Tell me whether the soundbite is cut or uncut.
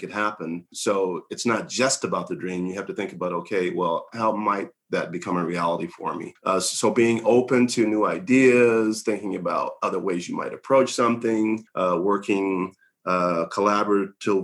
uncut